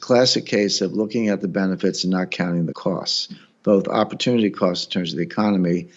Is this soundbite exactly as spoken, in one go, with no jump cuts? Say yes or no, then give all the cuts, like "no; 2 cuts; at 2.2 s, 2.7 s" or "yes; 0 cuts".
yes; 0 cuts